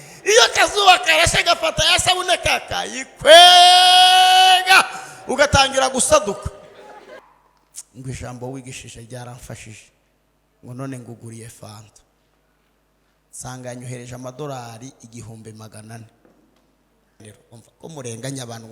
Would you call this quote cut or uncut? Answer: cut